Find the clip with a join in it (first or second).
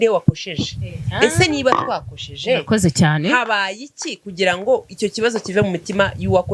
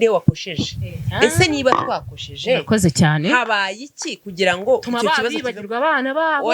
second